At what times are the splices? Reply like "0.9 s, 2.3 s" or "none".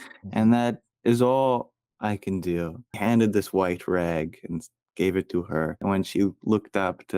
3.0 s, 5.8 s